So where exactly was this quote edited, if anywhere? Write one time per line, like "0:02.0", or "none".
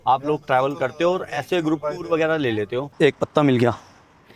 0:02.8